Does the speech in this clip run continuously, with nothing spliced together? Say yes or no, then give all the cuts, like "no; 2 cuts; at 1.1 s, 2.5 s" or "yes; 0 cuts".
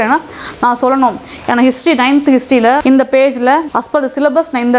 no; 2 cuts; at 2.8 s, 3.8 s